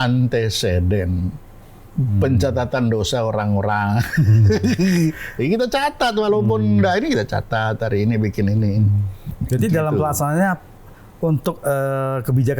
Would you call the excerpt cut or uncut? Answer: uncut